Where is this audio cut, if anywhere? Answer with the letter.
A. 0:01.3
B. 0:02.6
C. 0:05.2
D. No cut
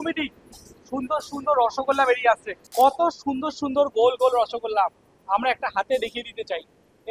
B